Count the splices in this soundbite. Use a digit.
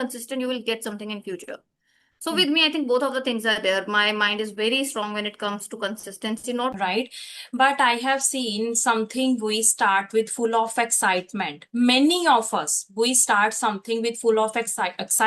1